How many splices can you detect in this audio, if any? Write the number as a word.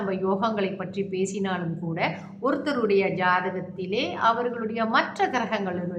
zero